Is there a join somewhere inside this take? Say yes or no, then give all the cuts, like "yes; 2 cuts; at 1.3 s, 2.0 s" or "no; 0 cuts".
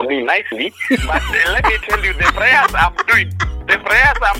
no; 0 cuts